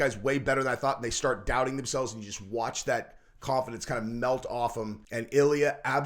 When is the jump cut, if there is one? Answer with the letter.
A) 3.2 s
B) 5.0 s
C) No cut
B